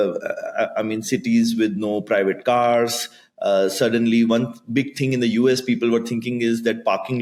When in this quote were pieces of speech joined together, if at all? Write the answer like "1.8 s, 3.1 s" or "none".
none